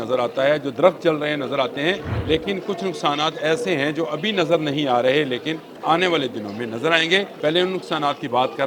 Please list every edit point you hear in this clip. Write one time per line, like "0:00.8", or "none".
0:02.1
0:05.7
0:07.3